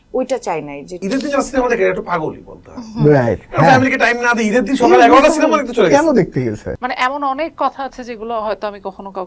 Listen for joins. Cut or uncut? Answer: cut